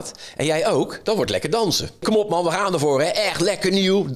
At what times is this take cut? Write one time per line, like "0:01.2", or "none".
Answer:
0:02.0